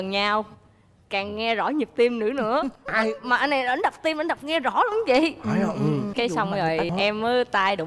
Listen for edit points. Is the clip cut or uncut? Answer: uncut